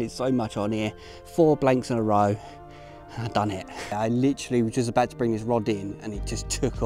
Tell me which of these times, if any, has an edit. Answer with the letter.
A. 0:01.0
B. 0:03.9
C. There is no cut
B